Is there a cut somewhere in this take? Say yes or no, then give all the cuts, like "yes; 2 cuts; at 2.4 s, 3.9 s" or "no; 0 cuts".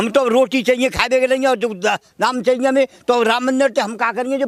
no; 0 cuts